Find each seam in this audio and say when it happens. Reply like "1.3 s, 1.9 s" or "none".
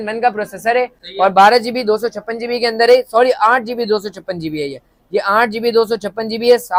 none